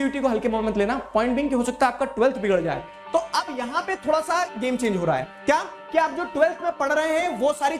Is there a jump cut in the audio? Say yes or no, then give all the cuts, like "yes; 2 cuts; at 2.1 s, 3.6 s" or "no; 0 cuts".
yes; 1 cut; at 2.9 s